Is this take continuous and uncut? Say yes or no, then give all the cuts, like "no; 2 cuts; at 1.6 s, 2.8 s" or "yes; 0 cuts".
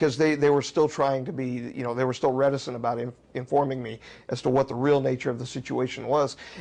yes; 0 cuts